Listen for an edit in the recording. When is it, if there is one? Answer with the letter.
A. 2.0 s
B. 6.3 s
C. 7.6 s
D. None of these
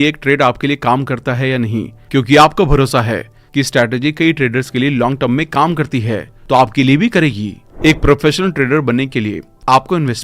C